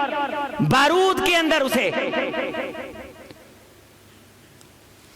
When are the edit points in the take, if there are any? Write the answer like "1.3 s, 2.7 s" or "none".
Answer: none